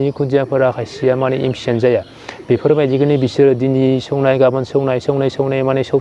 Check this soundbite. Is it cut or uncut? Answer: uncut